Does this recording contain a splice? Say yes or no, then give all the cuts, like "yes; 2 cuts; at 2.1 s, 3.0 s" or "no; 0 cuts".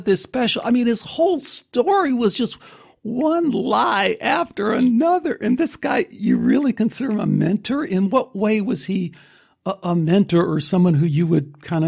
no; 0 cuts